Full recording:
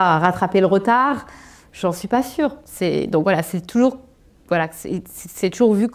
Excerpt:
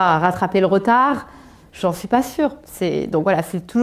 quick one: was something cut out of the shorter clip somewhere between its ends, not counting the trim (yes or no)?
no